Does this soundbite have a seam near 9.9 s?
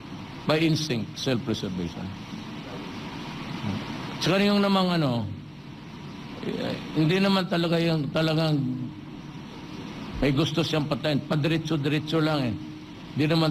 yes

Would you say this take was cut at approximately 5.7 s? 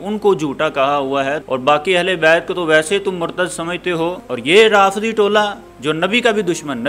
no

